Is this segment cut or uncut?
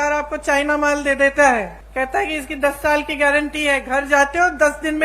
cut